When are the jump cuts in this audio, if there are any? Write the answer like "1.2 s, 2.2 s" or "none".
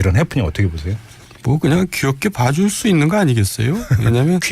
3.4 s